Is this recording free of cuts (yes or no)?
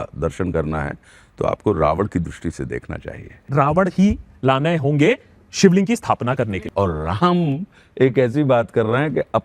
no